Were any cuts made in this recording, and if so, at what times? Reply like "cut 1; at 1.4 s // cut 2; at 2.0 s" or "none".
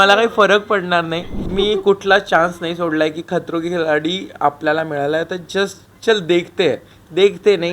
cut 1; at 1.4 s